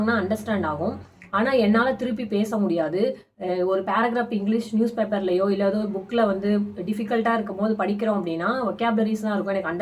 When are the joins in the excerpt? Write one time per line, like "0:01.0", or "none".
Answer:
none